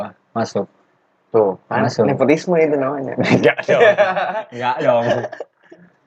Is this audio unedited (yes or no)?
yes